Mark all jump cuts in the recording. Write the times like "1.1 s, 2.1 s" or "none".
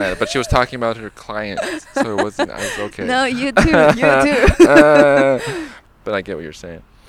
5.7 s